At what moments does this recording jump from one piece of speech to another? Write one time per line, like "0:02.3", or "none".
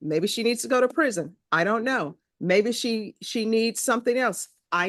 none